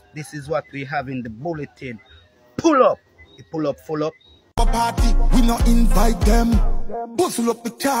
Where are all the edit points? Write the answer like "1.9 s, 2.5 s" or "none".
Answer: 4.6 s